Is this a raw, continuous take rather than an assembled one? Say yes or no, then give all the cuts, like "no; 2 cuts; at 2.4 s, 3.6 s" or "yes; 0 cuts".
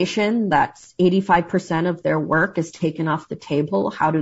yes; 0 cuts